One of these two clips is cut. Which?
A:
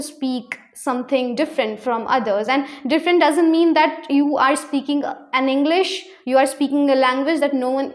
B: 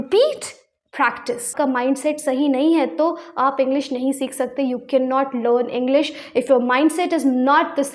B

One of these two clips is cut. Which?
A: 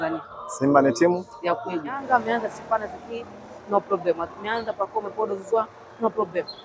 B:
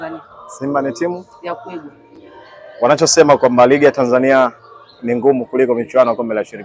A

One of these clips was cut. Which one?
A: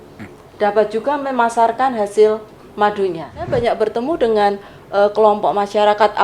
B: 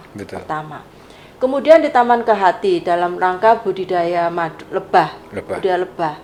A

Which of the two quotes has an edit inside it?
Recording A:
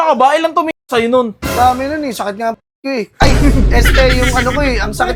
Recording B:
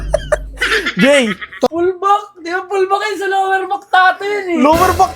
B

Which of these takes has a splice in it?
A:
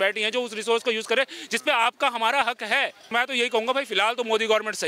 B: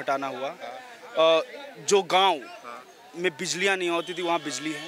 A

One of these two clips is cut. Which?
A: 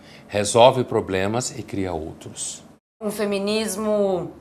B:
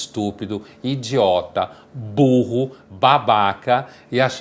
A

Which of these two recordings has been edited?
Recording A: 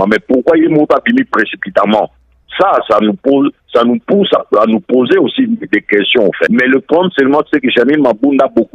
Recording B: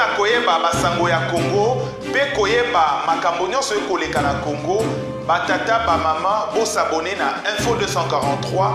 A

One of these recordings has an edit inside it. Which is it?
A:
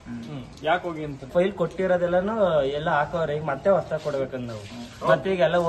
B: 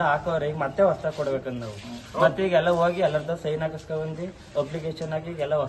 A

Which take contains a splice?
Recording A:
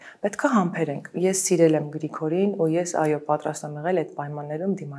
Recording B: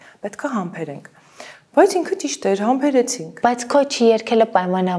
A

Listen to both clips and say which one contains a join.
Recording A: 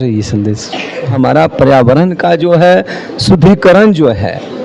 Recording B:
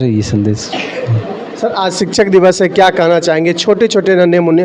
A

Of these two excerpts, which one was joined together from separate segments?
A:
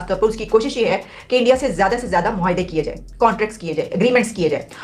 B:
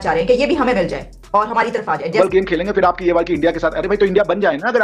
B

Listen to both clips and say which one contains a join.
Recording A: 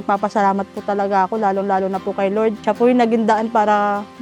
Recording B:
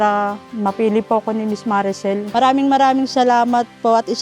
B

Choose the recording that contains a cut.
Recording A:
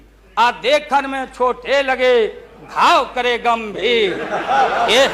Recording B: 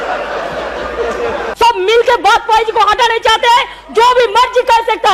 B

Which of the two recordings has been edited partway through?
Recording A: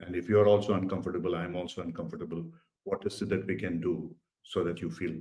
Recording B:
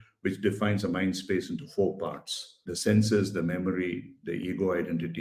B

